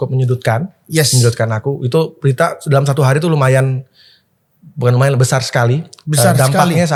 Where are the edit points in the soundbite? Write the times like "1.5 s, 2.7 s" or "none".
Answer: none